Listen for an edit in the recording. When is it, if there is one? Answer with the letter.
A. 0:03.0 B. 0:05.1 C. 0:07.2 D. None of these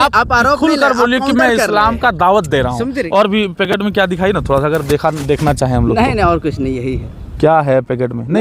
A